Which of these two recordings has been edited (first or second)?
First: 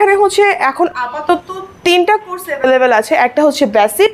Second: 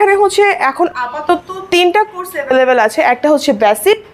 second